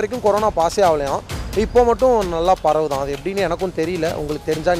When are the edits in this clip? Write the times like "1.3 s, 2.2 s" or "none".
none